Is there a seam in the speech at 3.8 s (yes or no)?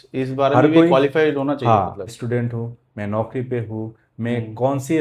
no